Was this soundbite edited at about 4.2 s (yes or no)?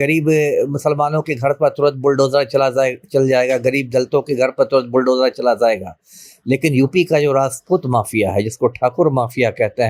no